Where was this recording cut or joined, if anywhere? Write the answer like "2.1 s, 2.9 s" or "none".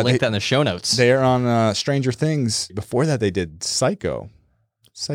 2.8 s